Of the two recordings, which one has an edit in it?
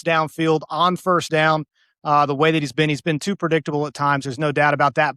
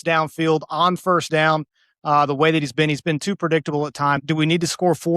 second; 1 cut; at 4.2 s

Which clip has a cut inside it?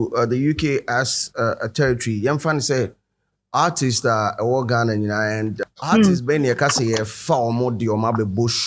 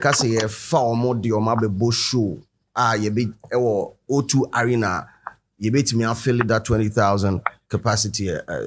first; 1 cut; at 5.6 s

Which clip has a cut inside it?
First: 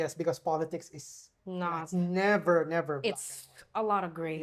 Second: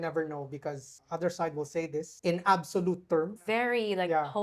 second; 3 cuts; at 1.0 s, 2.1 s, 3.4 s

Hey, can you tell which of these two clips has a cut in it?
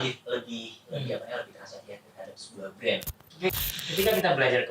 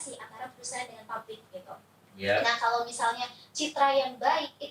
first; 1 cut; at 3.5 s

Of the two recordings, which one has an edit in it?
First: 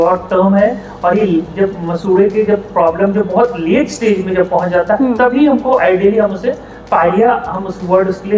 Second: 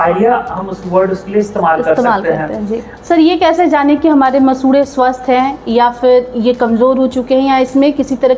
second; 1 cut; at 2.9 s

